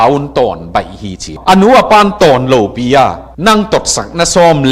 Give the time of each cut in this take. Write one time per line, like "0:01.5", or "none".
0:01.4